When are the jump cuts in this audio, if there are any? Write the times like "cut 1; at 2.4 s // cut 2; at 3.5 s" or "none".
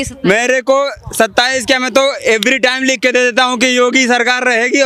none